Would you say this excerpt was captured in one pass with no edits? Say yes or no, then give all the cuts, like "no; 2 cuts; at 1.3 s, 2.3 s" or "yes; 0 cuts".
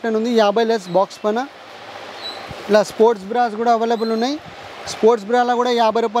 yes; 0 cuts